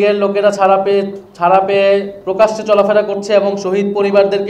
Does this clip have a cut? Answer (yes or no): no